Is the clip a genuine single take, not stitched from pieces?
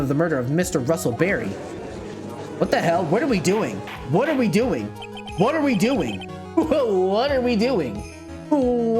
yes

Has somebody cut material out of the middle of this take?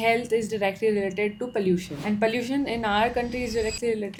no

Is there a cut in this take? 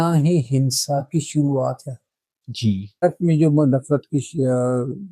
yes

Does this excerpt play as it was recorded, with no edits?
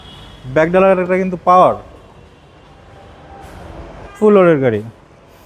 no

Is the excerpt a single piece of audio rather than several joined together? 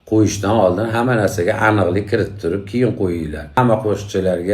no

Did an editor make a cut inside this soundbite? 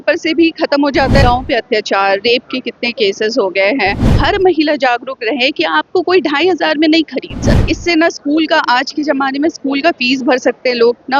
yes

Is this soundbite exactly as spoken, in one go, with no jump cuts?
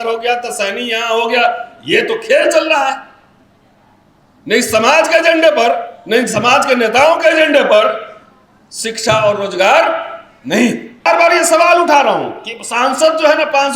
no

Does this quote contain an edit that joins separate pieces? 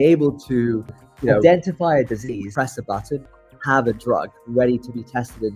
yes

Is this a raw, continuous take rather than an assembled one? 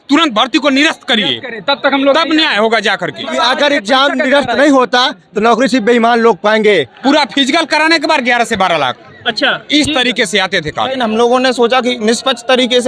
no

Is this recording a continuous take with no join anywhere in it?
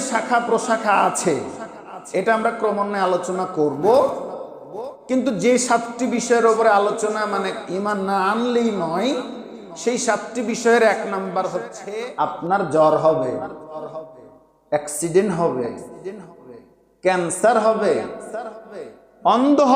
no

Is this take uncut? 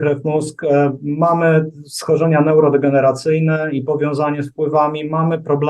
yes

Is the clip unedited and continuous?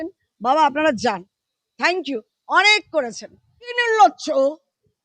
no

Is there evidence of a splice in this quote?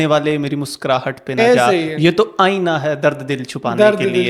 no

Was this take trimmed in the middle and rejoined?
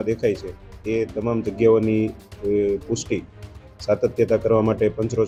no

